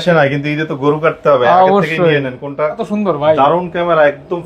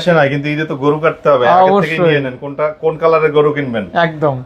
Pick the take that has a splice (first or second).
first